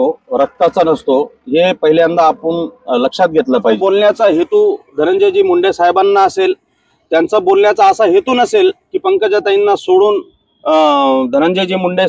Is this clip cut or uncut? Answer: cut